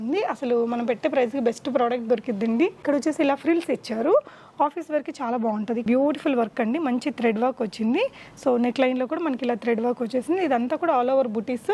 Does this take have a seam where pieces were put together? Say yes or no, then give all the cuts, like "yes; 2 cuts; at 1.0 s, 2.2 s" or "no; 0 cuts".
yes; 2 cuts; at 2.8 s, 5.8 s